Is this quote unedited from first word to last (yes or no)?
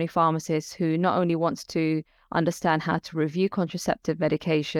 yes